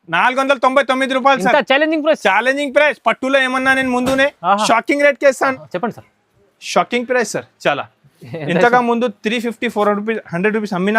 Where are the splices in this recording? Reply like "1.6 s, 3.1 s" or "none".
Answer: 5.5 s